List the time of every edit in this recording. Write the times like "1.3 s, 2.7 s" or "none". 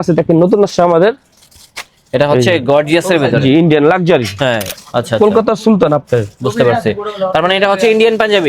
4.7 s